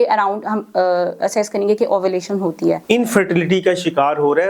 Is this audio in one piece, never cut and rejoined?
no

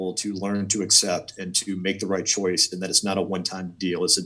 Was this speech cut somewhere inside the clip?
no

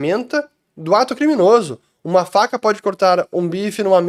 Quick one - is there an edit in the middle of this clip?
no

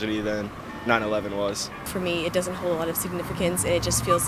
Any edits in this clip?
yes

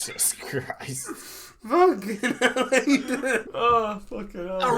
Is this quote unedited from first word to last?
no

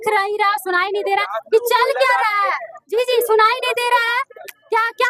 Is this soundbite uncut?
yes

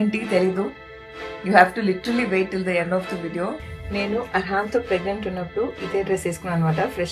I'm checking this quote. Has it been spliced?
yes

